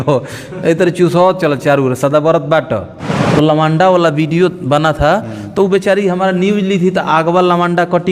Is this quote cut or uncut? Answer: cut